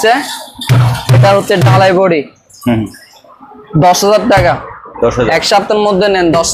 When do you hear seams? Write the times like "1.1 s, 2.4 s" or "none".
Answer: none